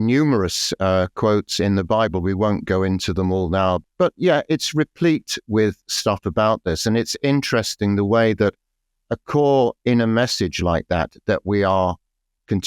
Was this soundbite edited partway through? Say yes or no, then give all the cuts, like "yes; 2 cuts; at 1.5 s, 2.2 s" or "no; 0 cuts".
yes; 1 cut; at 3.9 s